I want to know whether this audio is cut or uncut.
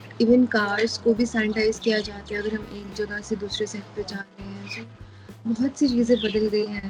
uncut